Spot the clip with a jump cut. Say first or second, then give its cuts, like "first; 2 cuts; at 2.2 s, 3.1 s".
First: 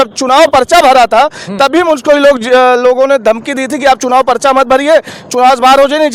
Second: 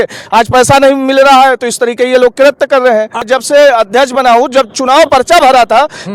second; 1 cut; at 3.2 s